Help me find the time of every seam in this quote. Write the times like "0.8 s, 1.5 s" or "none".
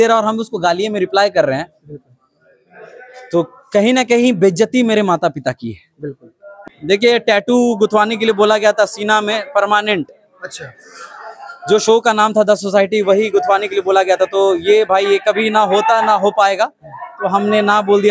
6.5 s